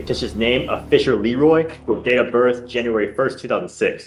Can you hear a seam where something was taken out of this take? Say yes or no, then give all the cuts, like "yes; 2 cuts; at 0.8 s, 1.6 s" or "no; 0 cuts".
no; 0 cuts